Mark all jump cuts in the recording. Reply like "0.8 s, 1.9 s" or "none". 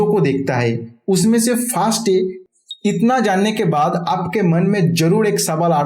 2.4 s